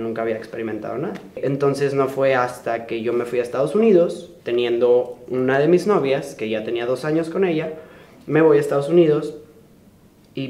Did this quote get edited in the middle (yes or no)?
yes